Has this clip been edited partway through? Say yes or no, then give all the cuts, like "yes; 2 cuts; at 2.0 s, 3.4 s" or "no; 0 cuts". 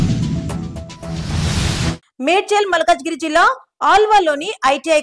yes; 1 cut; at 2.1 s